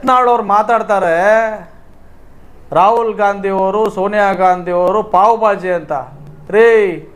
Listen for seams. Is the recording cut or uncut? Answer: uncut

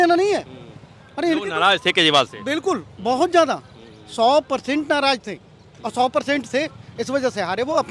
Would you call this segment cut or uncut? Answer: uncut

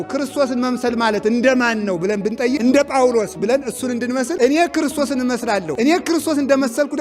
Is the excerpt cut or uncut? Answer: cut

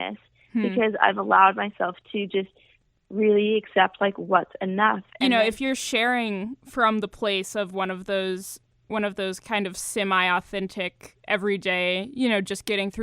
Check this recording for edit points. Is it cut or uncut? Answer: cut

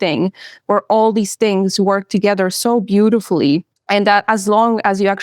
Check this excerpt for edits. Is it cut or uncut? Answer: cut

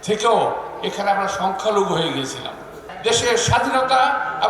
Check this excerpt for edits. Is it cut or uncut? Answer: cut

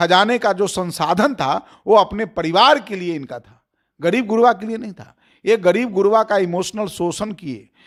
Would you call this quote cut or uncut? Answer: uncut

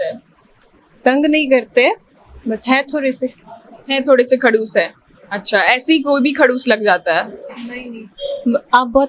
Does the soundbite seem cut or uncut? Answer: uncut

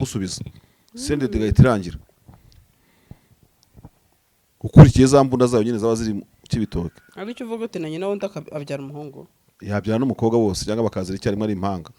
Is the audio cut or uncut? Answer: uncut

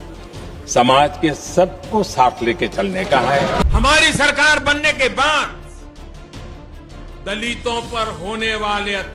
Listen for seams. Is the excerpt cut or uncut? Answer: cut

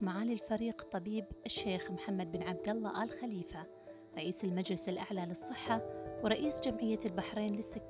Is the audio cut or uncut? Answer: uncut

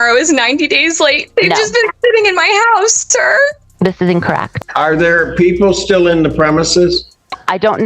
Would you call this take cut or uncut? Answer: cut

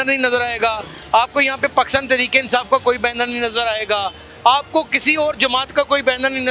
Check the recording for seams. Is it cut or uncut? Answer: uncut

